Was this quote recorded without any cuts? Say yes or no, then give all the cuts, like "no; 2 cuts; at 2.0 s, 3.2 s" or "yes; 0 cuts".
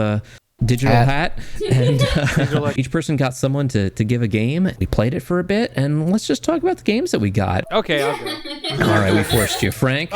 no; 3 cuts; at 2.7 s, 4.8 s, 7.6 s